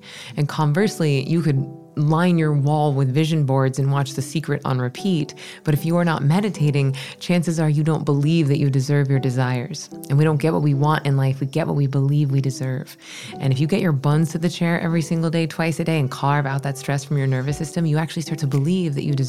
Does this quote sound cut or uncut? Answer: cut